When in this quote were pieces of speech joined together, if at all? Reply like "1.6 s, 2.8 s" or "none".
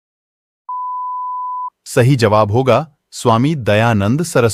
none